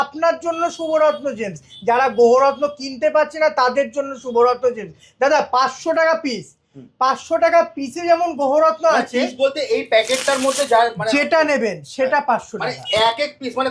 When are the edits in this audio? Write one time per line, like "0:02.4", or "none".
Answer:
none